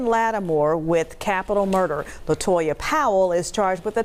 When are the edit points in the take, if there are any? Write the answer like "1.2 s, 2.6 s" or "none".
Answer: none